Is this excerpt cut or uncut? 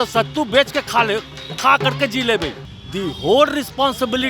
cut